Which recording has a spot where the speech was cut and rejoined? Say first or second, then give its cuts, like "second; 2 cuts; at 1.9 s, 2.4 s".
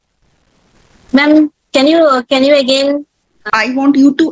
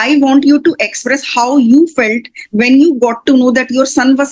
first; 1 cut; at 3.4 s